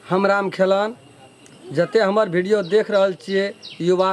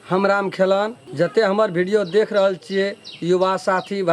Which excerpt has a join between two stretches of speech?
second; 1 cut; at 1.0 s

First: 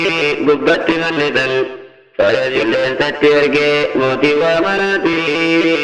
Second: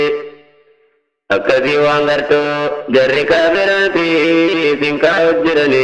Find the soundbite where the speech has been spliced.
first; 1 cut; at 2.6 s

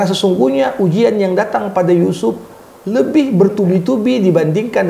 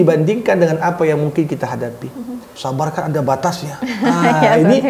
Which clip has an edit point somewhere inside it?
second; 1 cut; at 2.5 s

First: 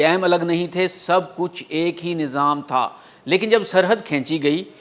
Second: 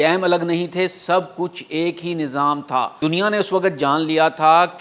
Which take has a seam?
second; 1 cut; at 3.0 s

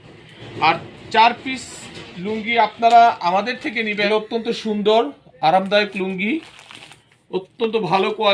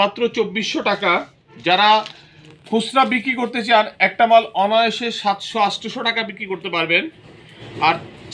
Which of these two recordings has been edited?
first; 1 cut; at 4.0 s

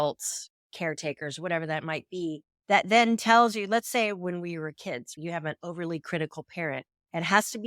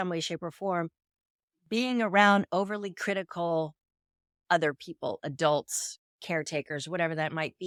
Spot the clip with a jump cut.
first; 1 cut; at 5.1 s

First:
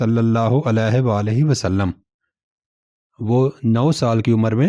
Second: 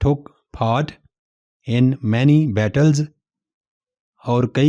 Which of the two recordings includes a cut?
second; 1 cut; at 3.8 s

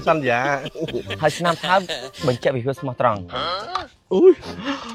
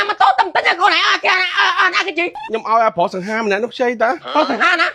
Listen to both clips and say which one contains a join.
second; 1 cut; at 2.4 s

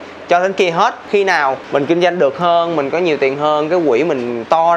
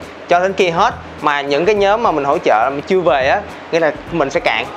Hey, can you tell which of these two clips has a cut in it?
first; 1 cut; at 1.1 s

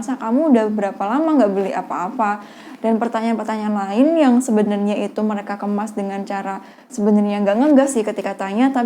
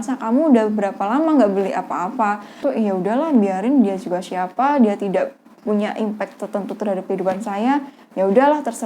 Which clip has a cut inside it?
second; 1 cut; at 2.6 s

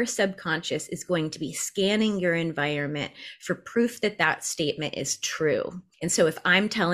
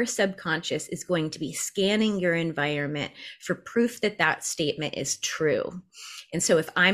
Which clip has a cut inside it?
first; 1 cut; at 5.8 s

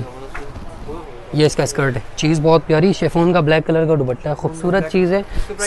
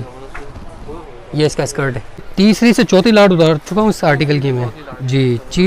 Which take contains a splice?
second; 1 cut; at 2.2 s

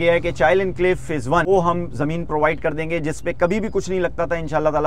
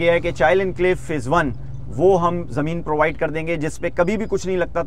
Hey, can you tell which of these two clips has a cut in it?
first; 1 cut; at 1.4 s

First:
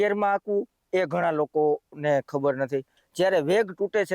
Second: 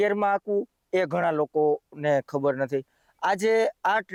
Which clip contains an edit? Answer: first; 1 cut; at 3.0 s

